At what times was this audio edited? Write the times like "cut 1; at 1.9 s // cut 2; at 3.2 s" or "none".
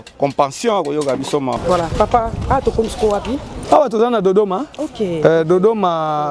cut 1; at 1.6 s